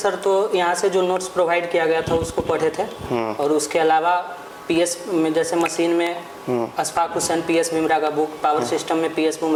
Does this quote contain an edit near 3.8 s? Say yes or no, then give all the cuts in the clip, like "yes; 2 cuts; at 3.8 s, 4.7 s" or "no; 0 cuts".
no; 0 cuts